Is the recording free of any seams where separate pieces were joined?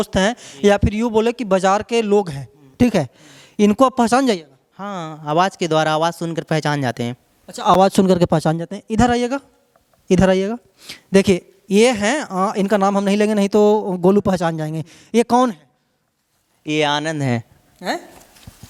yes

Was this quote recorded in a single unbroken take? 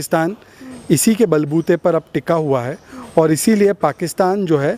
yes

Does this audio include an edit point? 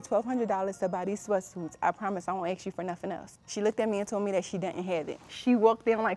yes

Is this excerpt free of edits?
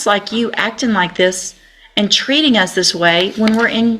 yes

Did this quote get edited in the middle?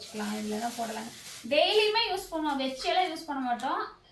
no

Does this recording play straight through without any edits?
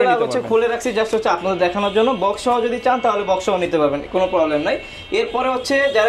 yes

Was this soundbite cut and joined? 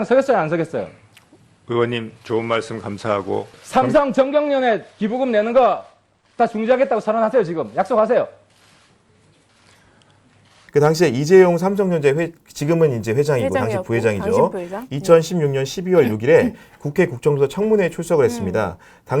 yes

